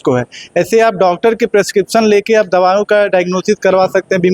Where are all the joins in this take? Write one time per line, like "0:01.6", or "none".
none